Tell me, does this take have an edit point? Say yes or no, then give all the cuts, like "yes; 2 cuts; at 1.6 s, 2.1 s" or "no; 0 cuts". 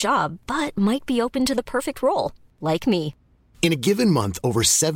no; 0 cuts